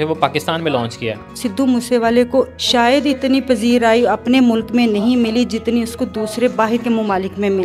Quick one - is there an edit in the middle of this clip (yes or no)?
yes